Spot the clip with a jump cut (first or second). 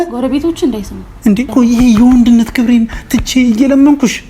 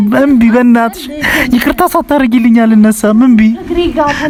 first